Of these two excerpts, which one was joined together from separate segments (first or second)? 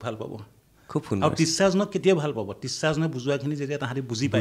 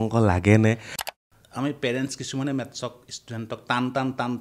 second